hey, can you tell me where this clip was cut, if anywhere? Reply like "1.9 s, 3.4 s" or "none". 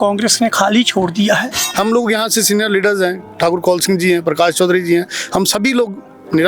1.6 s